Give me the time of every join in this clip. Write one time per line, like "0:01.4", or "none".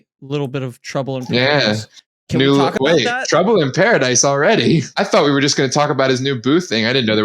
0:04.9